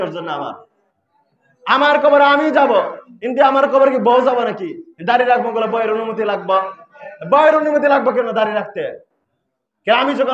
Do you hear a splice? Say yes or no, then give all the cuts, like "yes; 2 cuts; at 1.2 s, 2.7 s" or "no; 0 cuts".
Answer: no; 0 cuts